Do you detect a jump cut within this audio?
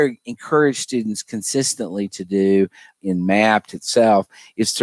yes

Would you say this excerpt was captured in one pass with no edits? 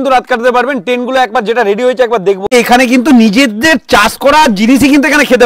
no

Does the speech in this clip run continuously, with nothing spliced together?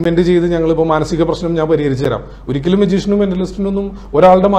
yes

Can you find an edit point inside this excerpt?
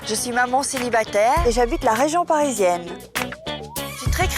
no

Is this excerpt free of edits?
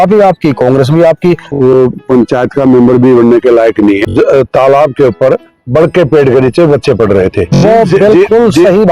no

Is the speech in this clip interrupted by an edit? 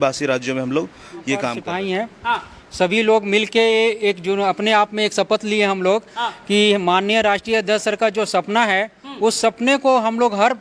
yes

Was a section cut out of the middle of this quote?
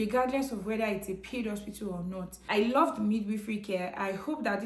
yes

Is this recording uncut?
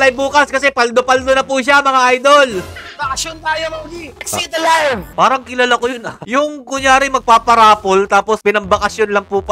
no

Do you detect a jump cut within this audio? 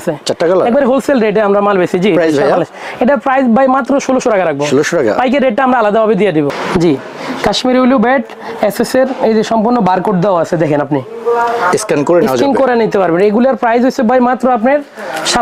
yes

